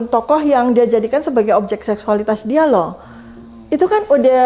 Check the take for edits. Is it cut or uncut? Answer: uncut